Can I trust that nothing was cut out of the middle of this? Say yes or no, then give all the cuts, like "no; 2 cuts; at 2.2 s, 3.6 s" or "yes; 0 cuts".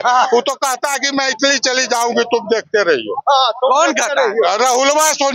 yes; 0 cuts